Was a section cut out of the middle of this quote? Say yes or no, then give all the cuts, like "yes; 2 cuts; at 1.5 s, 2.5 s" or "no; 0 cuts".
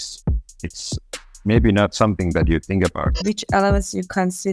yes; 1 cut; at 3.2 s